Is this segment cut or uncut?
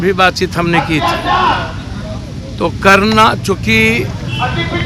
uncut